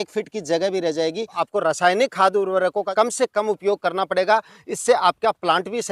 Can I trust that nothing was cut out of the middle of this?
no; 2 cuts; at 1.4 s, 2.9 s

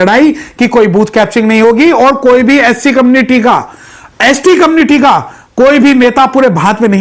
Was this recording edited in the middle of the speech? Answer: no; 0 cuts

